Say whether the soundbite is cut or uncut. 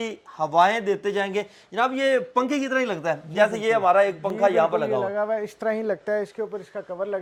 uncut